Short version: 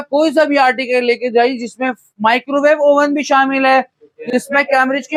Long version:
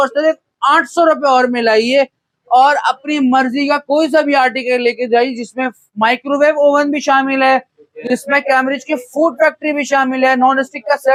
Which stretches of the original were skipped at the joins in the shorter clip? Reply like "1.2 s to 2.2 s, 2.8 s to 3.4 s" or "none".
none